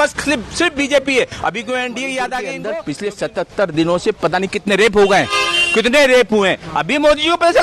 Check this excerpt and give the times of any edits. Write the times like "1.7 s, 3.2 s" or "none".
2.7 s